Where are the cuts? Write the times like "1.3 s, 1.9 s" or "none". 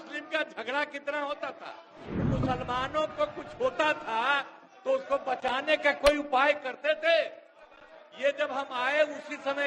2.3 s